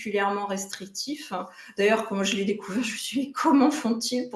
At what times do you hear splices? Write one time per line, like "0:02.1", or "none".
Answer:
none